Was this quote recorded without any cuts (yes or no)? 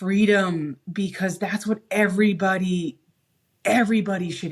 yes